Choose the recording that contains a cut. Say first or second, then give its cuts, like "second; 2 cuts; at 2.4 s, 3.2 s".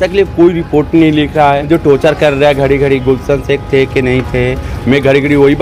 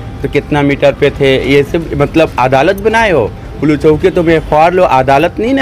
first; 1 cut; at 1.6 s